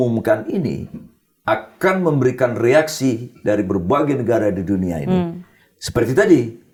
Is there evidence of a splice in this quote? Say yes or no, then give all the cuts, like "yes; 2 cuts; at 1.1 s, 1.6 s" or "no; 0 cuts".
no; 0 cuts